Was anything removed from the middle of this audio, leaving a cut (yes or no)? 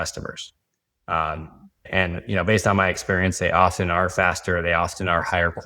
yes